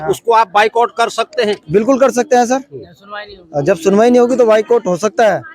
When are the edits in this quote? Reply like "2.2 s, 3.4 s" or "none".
none